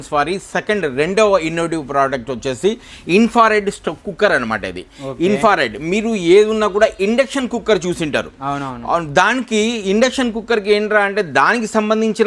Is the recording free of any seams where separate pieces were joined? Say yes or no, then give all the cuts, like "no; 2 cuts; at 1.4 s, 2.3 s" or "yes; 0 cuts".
yes; 0 cuts